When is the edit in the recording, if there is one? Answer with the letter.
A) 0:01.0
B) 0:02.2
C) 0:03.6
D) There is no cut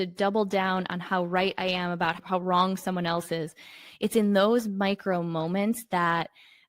B